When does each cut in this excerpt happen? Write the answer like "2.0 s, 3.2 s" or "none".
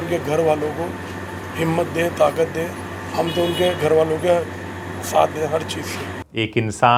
none